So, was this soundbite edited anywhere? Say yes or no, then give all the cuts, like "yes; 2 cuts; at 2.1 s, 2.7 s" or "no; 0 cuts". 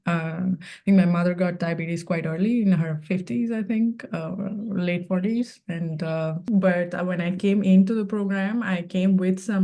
yes; 1 cut; at 6.5 s